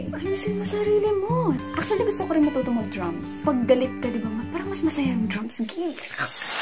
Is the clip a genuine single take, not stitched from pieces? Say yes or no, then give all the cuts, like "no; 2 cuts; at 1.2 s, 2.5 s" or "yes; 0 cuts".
no; 1 cut; at 1.6 s